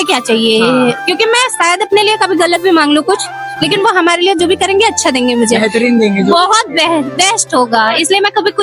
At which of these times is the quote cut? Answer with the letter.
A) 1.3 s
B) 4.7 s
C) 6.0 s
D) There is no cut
D